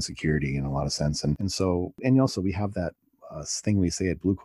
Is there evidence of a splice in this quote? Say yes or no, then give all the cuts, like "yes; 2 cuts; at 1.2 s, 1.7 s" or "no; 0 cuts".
no; 0 cuts